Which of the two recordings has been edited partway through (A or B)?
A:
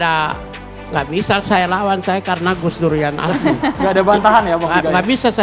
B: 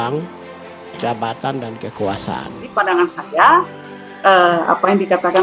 B